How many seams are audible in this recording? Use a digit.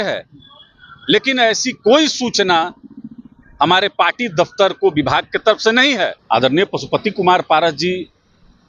1